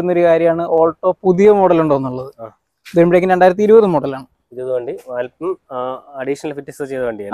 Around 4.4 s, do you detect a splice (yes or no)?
no